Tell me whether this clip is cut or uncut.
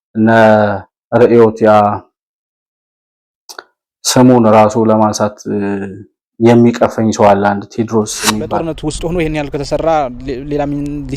cut